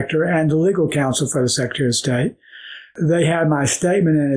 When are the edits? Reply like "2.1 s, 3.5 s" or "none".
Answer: 2.9 s

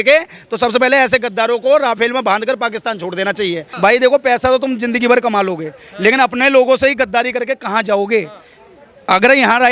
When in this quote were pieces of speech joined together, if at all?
3.6 s

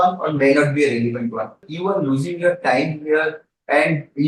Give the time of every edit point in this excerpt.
1.6 s

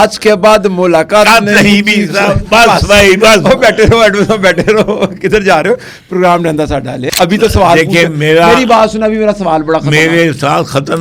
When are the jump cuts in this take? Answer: 7.0 s

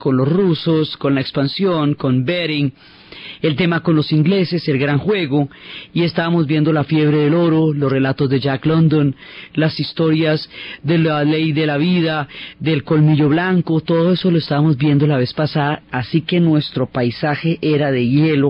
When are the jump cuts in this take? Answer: none

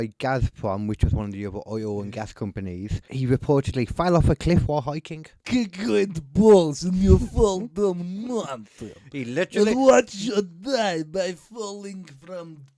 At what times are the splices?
3.0 s, 5.3 s

